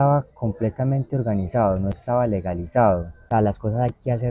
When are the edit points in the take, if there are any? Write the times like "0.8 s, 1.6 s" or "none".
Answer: 3.1 s